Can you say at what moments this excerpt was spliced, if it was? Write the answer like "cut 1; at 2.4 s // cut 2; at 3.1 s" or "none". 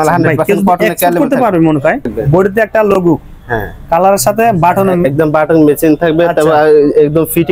cut 1; at 2.1 s

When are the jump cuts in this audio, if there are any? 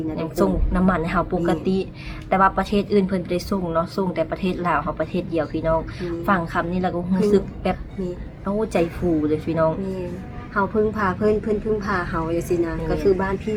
none

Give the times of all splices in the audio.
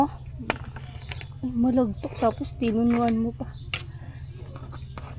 none

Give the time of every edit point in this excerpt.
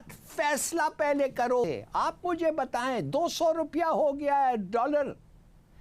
cut 1; at 1.6 s

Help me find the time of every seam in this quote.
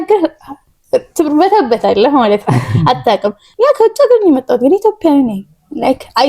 cut 1; at 3.4 s

